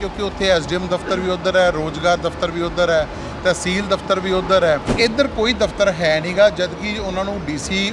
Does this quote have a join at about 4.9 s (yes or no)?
yes